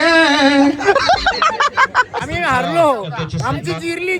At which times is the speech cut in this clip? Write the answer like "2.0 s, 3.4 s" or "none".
2.3 s